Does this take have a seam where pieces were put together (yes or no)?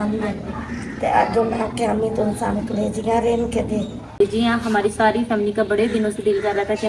yes